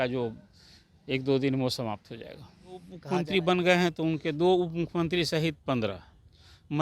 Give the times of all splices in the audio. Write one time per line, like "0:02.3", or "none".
0:03.0

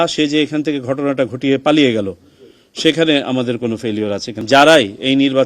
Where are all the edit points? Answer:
0:04.3

